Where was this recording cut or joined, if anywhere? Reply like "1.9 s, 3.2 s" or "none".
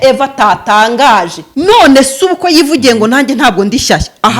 1.4 s